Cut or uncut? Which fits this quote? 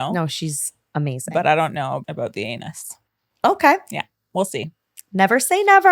cut